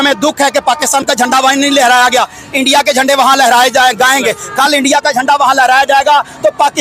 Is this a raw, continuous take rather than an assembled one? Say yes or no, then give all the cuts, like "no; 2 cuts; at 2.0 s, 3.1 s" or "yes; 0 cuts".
yes; 0 cuts